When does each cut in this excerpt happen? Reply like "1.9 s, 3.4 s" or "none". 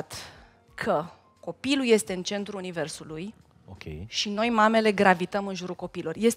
1.2 s